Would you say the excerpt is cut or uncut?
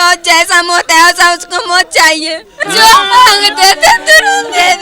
cut